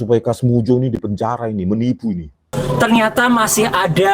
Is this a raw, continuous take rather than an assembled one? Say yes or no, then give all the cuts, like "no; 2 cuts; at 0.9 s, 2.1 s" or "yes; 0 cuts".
no; 1 cut; at 2.6 s